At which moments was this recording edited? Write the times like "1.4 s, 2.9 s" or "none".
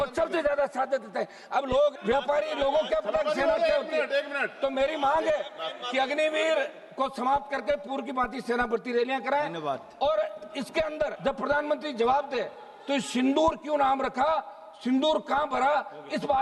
none